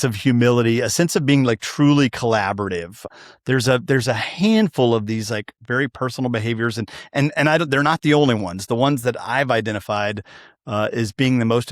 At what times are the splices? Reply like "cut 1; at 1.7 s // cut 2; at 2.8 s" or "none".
cut 1; at 3.1 s